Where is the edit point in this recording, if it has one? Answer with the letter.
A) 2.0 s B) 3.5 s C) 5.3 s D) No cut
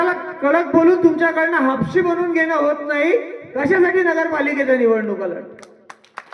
B